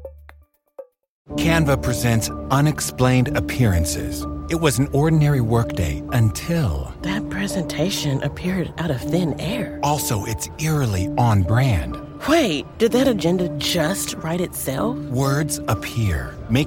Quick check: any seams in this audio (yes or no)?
yes